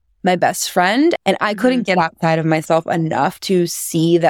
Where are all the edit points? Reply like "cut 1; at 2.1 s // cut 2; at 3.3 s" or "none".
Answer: cut 1; at 1.2 s

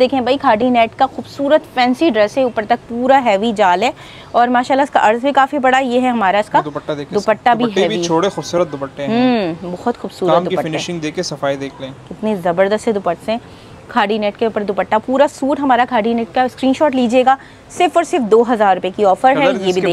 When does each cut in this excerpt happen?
none

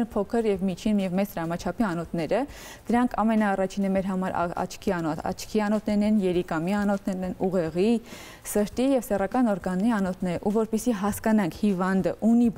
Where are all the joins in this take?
none

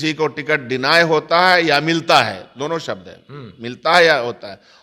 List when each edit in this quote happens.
none

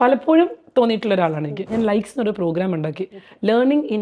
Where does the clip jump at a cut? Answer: cut 1; at 1.7 s

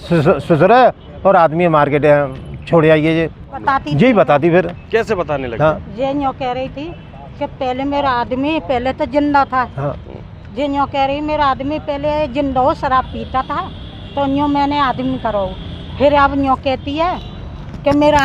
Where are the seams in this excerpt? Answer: cut 1; at 3.6 s

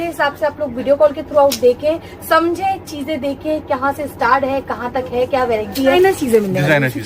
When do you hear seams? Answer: cut 1; at 5.9 s

